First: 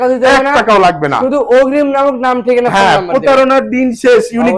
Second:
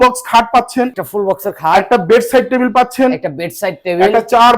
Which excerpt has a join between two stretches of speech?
second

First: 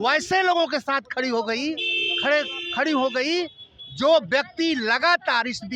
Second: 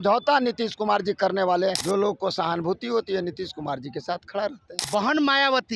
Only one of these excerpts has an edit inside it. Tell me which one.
second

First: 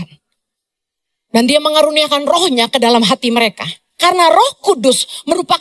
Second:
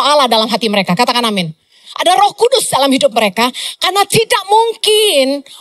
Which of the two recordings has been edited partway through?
first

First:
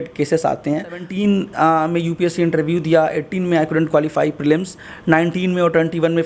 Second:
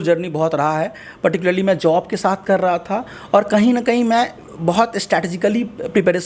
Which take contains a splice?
first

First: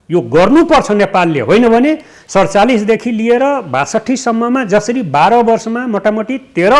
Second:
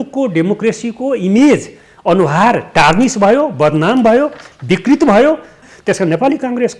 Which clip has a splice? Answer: second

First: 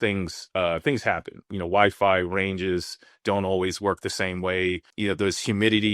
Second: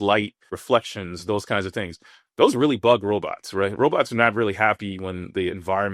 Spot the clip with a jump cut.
first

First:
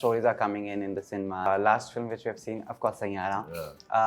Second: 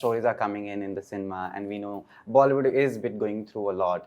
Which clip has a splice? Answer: first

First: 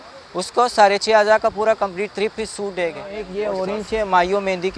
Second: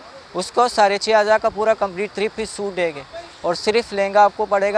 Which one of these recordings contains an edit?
first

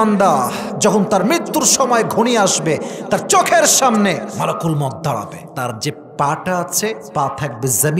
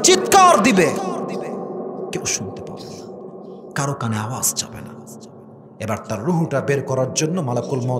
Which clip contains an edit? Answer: first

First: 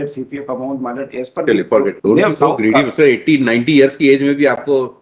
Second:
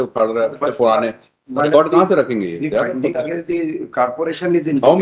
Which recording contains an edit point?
first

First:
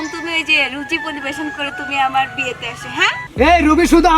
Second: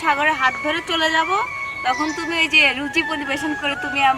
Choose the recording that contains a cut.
first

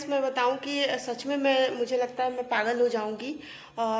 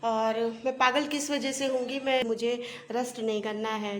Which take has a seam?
second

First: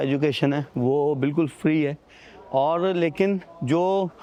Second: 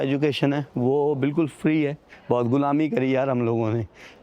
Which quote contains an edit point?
second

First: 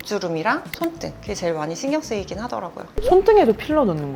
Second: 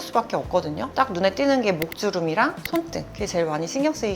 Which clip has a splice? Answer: second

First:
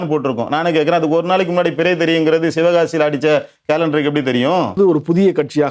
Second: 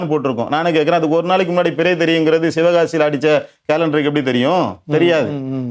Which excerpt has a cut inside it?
first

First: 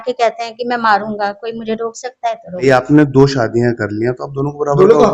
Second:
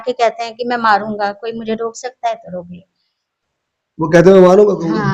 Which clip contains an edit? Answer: first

